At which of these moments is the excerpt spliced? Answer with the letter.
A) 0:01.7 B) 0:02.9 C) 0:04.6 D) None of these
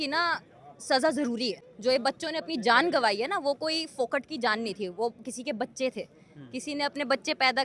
A